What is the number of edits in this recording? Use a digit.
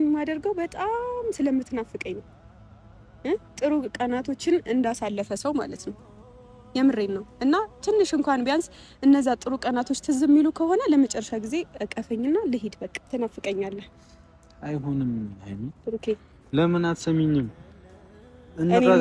1